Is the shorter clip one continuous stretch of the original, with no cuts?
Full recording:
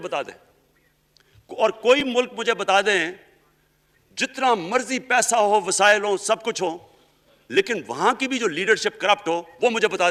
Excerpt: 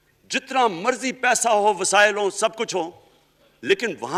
yes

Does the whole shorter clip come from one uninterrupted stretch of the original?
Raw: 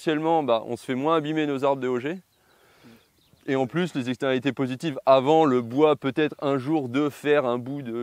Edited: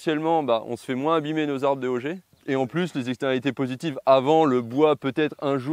no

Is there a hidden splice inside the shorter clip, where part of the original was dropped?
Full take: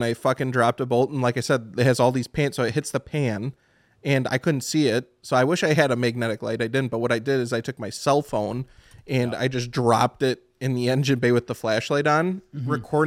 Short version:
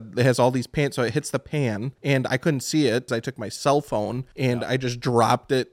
yes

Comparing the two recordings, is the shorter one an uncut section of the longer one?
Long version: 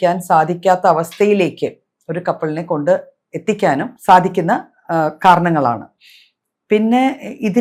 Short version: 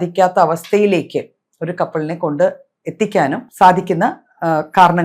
yes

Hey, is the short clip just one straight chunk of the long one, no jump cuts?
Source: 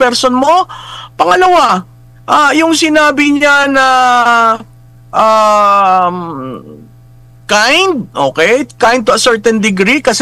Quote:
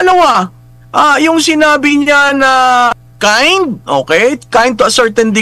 no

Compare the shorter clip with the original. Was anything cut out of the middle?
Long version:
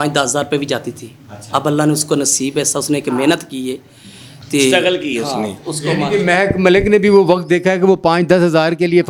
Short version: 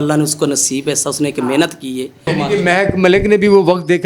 yes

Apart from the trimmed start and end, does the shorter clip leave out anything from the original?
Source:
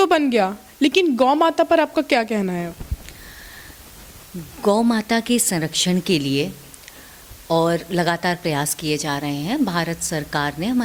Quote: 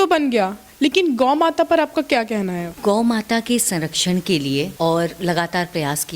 yes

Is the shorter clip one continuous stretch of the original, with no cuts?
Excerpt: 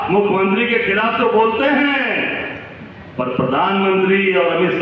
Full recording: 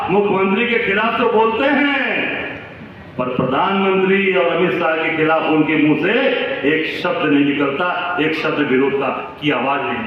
yes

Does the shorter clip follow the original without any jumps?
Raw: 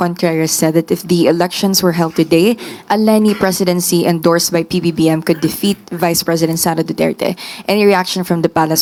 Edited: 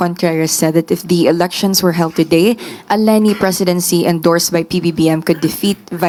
yes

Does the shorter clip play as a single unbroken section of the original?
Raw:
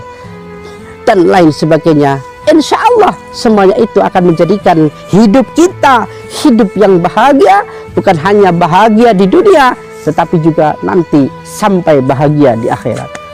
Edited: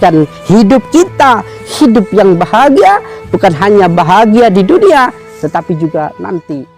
yes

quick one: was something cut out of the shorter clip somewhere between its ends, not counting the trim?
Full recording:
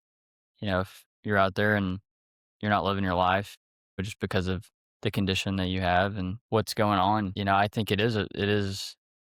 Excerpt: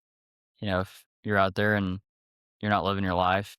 no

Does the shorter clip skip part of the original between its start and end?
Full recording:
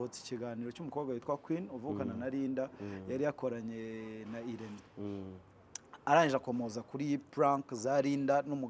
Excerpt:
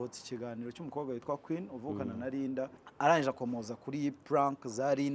yes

